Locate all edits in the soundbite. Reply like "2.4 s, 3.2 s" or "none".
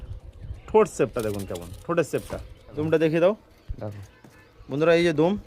2.8 s